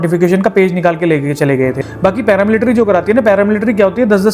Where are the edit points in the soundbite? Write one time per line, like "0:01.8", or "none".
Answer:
0:01.9